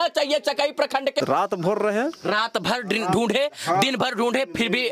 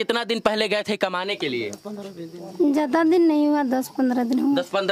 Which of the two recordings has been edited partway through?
first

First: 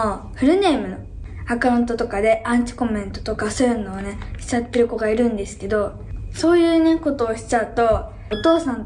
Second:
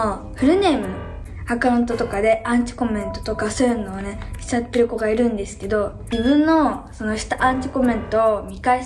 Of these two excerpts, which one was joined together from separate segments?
second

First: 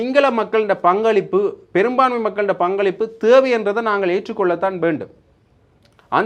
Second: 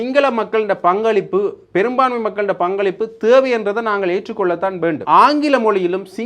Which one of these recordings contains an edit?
second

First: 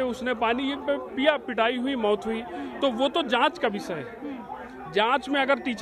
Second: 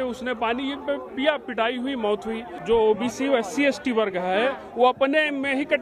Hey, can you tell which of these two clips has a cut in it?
second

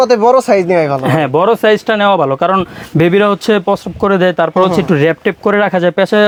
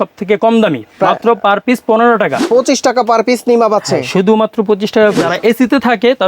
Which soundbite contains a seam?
second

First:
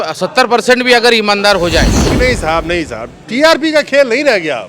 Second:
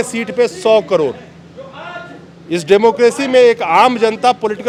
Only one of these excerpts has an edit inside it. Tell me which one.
first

